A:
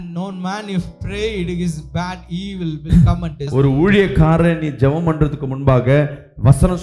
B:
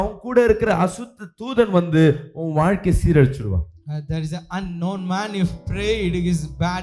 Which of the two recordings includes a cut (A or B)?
A